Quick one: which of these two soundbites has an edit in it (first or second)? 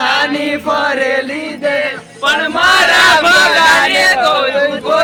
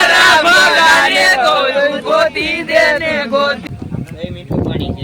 second